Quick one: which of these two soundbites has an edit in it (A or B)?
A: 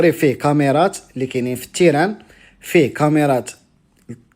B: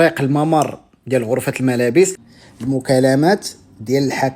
B